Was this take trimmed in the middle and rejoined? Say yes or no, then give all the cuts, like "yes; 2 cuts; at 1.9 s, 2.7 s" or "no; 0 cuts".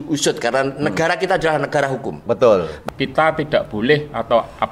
yes; 1 cut; at 2.8 s